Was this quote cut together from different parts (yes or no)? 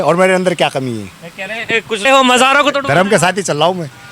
yes